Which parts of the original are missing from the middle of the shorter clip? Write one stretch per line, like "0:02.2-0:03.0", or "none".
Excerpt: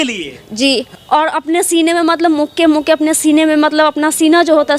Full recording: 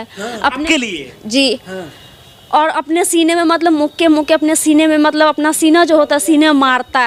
0:01.7-0:02.4